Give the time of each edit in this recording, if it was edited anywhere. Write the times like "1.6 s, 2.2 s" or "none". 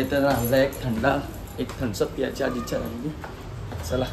none